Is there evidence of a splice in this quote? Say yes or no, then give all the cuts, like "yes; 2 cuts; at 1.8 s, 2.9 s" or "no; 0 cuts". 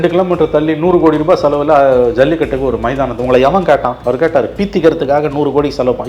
yes; 1 cut; at 3.9 s